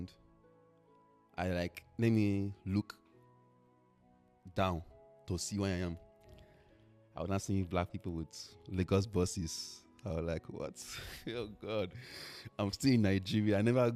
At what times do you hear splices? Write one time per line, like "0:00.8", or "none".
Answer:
none